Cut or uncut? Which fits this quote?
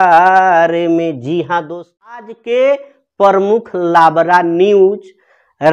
cut